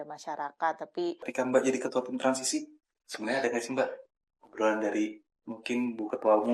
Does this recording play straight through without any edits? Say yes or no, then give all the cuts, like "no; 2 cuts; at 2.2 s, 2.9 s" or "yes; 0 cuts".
no; 1 cut; at 1.3 s